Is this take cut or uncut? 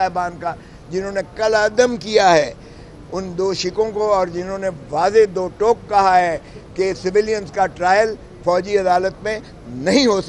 uncut